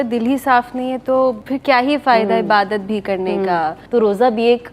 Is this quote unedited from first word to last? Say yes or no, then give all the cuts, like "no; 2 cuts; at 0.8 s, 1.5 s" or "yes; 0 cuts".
no; 2 cuts; at 1.5 s, 3.8 s